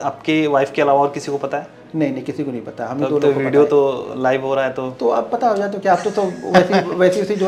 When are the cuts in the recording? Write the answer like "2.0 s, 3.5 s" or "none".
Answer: none